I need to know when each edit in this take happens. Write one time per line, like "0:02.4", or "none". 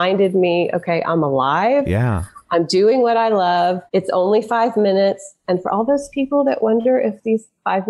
0:03.8